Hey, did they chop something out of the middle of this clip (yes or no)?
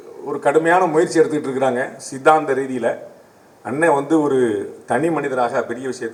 no